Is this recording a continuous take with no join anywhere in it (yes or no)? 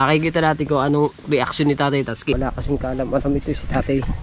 no